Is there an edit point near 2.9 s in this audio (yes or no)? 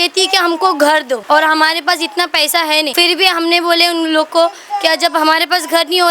yes